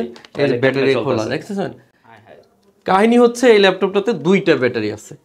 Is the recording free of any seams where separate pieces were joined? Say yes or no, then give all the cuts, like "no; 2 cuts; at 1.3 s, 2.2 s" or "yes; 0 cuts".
yes; 0 cuts